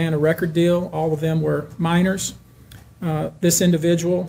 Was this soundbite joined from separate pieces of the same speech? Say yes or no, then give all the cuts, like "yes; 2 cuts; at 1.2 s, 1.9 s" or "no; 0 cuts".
no; 0 cuts